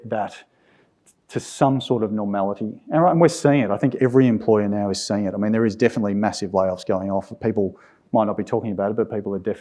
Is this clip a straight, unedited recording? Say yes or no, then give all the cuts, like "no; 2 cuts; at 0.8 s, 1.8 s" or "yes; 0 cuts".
yes; 0 cuts